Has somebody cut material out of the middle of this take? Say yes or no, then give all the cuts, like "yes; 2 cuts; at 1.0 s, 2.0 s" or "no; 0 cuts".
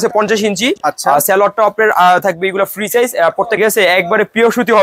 yes; 1 cut; at 3.6 s